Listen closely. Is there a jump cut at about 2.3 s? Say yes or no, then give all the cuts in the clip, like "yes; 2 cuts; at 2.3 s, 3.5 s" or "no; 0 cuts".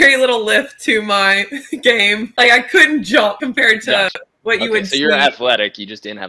yes; 2 cuts; at 2.3 s, 3.4 s